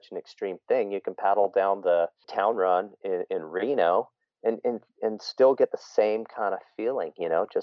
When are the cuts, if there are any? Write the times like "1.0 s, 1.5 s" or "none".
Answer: 2.2 s